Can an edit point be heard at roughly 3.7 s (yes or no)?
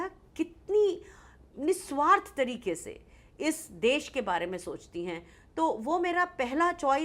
no